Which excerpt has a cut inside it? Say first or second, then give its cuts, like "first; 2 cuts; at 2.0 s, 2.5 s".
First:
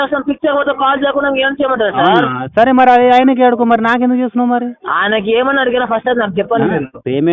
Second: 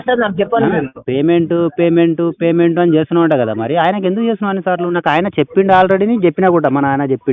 first; 1 cut; at 4.8 s